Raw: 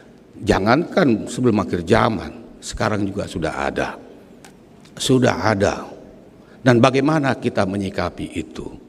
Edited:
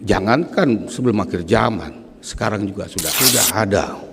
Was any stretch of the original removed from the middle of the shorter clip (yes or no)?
yes